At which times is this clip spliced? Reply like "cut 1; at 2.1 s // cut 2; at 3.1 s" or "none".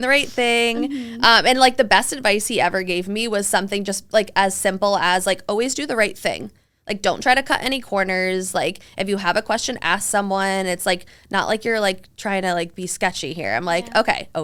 none